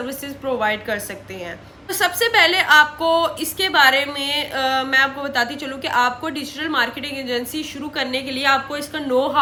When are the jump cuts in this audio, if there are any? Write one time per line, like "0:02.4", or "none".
none